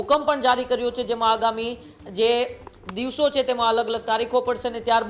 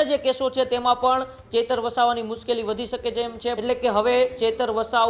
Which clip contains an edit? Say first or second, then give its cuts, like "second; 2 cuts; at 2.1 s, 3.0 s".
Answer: second; 1 cut; at 3.6 s